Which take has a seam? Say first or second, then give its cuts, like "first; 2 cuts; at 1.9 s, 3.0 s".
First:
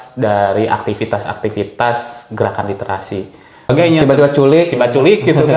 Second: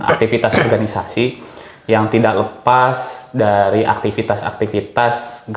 first; 1 cut; at 3.7 s